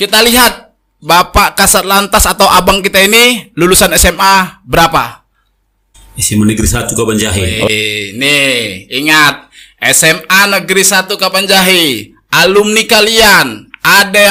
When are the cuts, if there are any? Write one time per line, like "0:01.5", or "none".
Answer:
none